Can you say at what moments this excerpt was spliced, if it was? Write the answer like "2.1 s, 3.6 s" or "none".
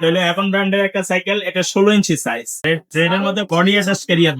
2.5 s